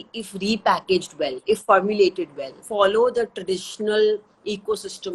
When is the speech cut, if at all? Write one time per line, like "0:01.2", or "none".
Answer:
0:02.6